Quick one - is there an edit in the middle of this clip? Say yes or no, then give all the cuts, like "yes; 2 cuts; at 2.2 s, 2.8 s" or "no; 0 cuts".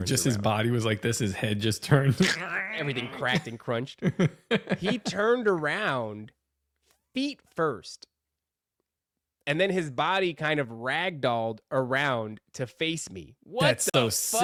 no; 0 cuts